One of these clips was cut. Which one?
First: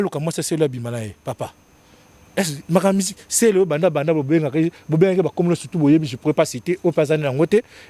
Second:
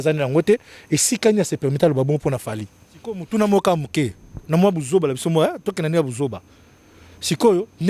second; 1 cut; at 3.2 s

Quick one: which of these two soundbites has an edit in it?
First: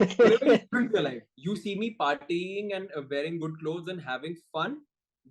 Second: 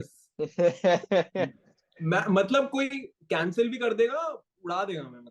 first; 1 cut; at 1.3 s

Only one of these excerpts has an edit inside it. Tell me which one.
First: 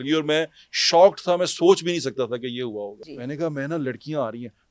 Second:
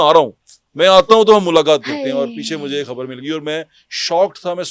first; 1 cut; at 3.1 s

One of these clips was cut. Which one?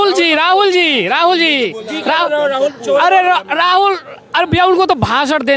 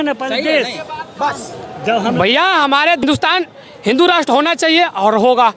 second; 1 cut; at 3.0 s

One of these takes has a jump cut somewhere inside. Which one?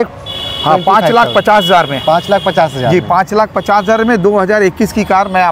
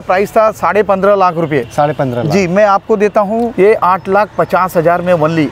second; 1 cut; at 3.5 s

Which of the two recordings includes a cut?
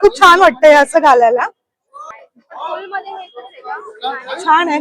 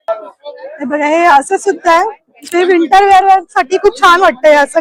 first; 1 cut; at 2.1 s

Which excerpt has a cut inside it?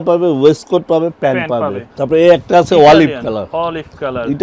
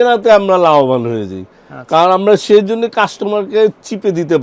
first; 1 cut; at 1.8 s

